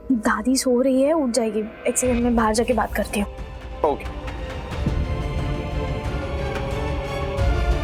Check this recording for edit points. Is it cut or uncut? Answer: uncut